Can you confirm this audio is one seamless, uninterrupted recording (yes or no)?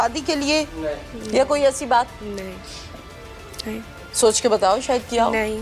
no